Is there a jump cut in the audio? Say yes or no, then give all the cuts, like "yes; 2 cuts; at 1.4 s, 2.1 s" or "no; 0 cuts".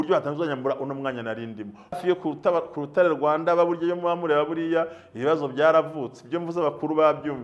yes; 1 cut; at 2.0 s